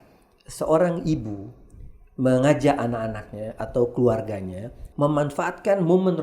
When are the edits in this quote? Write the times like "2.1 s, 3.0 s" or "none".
4.8 s

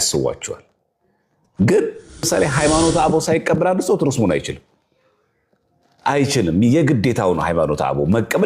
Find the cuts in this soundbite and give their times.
2.3 s

